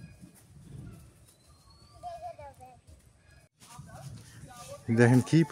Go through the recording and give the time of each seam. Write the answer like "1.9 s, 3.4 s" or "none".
3.5 s

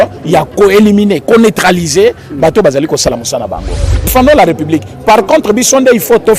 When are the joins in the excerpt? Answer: 4.1 s

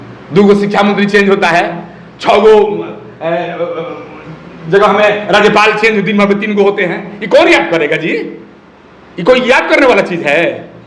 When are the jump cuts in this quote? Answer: none

